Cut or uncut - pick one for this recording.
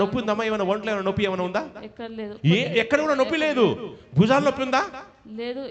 uncut